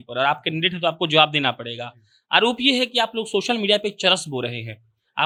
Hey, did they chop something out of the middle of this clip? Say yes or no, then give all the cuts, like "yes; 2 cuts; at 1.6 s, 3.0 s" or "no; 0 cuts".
no; 0 cuts